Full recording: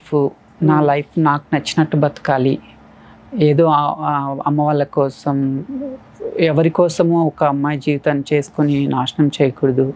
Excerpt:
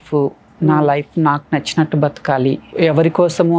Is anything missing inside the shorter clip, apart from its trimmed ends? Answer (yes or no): yes